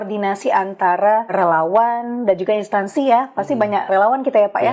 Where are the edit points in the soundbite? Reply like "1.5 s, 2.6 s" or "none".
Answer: 1.3 s, 3.9 s